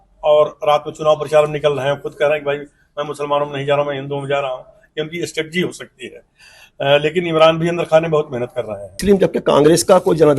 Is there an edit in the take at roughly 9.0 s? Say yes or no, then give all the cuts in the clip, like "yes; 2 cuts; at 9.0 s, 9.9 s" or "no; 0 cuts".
yes; 1 cut; at 9.0 s